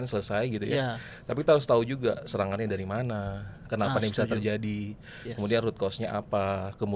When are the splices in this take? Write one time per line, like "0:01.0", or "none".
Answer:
none